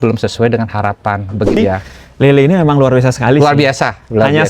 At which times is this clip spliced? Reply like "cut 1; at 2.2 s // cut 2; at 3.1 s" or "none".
cut 1; at 1.6 s